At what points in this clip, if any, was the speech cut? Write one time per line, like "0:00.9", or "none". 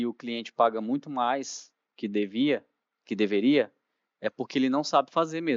none